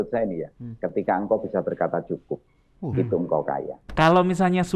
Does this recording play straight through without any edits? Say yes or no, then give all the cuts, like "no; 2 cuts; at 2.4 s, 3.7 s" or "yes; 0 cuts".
no; 1 cut; at 3.8 s